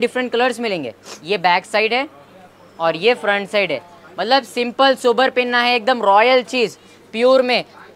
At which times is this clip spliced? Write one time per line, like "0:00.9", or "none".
none